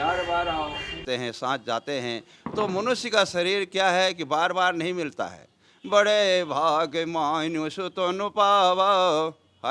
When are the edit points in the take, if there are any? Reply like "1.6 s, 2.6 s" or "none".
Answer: 1.0 s